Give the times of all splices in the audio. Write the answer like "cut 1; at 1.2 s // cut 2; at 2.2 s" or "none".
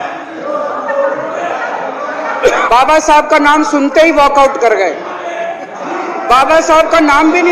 cut 1; at 2.7 s